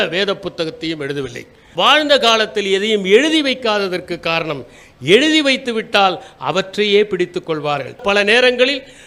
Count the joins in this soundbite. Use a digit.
2